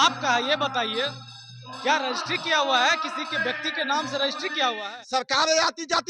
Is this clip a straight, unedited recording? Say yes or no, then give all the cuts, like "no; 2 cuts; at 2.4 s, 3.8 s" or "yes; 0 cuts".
no; 1 cut; at 4.8 s